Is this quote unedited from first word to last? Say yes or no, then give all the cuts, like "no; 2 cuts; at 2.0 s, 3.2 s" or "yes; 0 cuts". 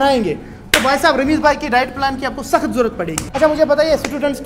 no; 1 cut; at 3.2 s